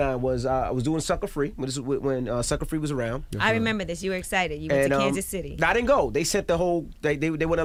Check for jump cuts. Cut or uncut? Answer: uncut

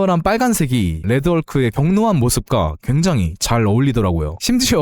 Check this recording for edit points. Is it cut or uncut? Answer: cut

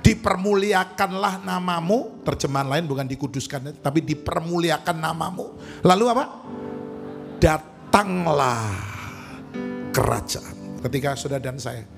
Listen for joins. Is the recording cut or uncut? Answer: cut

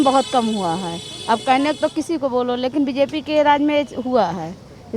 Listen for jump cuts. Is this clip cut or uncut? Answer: uncut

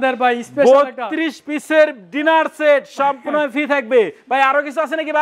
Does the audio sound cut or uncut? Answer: uncut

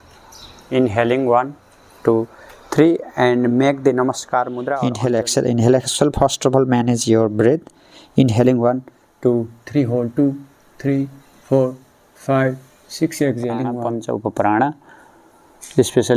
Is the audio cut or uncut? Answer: cut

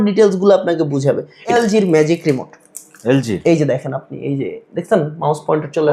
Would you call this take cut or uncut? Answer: cut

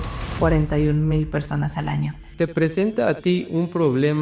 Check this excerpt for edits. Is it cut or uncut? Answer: cut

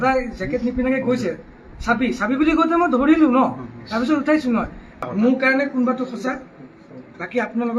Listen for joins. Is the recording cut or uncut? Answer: cut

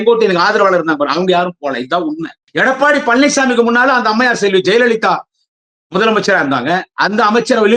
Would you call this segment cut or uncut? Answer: cut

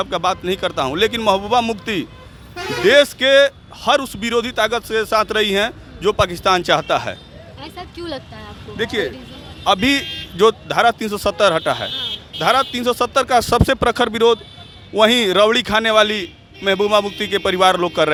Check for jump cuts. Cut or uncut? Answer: uncut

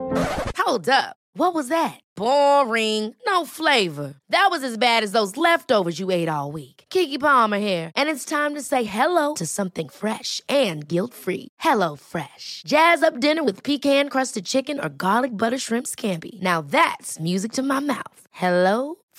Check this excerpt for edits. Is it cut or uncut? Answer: uncut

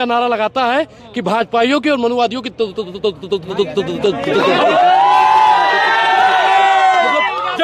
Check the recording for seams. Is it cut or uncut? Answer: uncut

